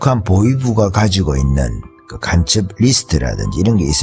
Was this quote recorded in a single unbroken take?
yes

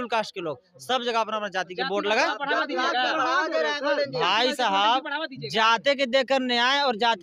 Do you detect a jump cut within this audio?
no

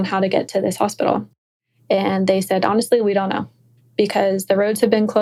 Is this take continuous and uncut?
yes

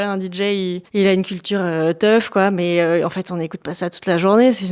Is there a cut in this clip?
no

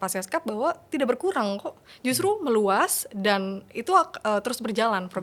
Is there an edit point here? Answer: no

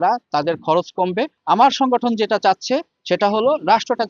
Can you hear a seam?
yes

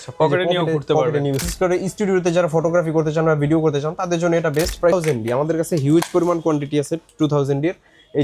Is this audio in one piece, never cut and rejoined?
no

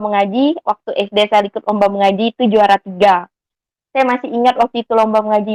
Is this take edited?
no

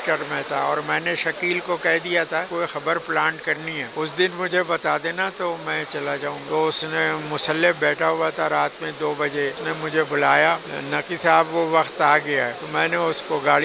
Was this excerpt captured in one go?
no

